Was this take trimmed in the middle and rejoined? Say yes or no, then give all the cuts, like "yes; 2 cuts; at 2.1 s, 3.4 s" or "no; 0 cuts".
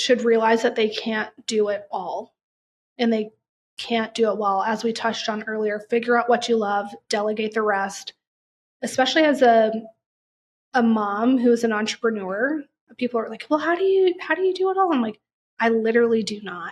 no; 0 cuts